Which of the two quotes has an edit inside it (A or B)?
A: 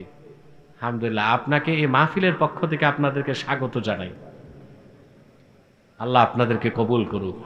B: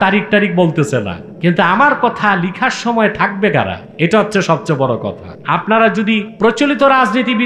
B